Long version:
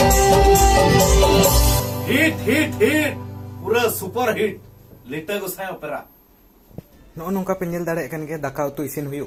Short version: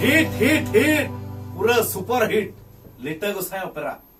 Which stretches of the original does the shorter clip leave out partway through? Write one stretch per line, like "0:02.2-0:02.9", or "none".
none